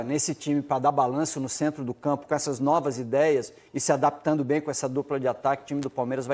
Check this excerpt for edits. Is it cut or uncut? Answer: uncut